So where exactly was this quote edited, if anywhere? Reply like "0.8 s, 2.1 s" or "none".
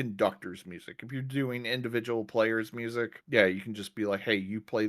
3.2 s